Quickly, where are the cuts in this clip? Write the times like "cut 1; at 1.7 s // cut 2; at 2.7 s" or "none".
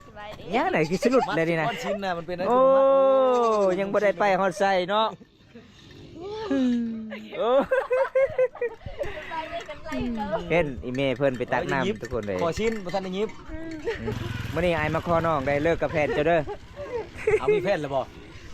cut 1; at 14.1 s